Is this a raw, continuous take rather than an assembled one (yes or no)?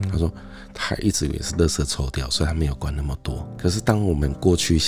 yes